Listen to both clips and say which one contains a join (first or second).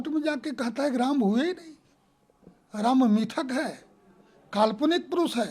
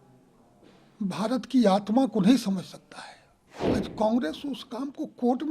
second